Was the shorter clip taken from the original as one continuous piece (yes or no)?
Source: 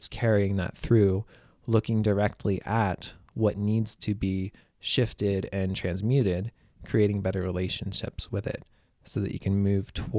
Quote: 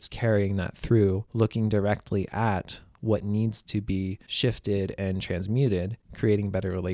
no